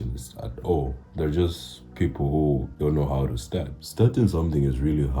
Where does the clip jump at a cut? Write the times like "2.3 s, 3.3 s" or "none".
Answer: 2.7 s, 3.8 s